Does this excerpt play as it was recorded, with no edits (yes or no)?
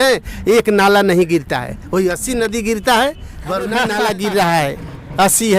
no